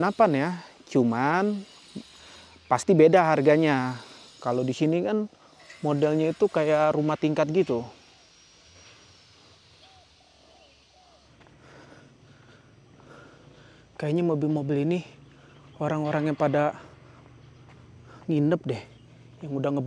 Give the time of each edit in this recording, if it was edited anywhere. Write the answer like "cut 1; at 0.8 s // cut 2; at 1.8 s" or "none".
cut 1; at 11.4 s